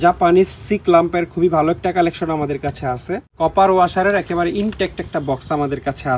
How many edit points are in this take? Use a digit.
1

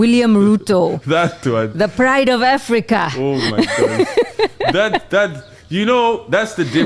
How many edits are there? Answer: 0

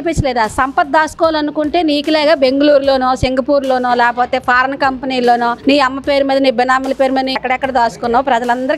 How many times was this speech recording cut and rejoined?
1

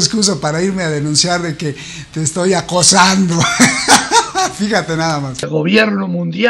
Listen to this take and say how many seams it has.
1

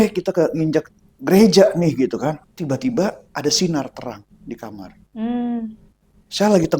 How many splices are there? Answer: 2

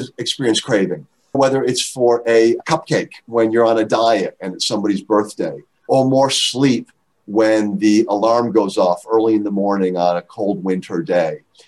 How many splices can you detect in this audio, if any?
2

